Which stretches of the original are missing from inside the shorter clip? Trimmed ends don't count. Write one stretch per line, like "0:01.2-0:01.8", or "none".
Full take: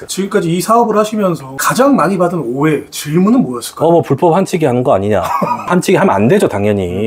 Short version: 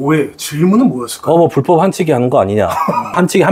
none